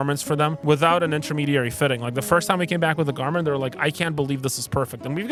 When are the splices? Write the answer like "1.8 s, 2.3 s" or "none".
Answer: none